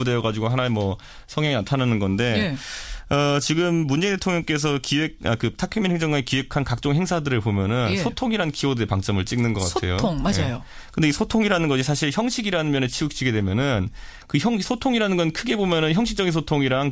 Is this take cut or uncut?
uncut